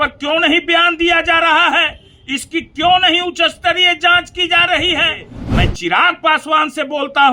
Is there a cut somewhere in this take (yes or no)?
yes